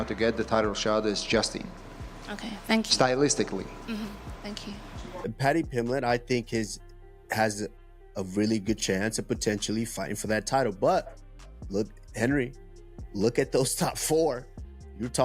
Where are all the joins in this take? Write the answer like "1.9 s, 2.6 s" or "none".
5.2 s